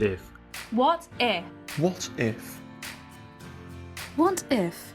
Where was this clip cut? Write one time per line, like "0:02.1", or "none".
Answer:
0:02.3
0:04.2